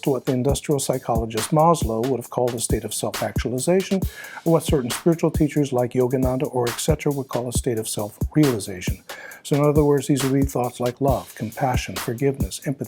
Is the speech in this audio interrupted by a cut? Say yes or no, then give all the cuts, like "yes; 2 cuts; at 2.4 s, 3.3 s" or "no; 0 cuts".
no; 0 cuts